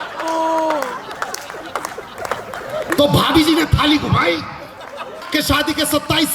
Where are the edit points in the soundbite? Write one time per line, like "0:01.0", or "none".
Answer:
0:05.2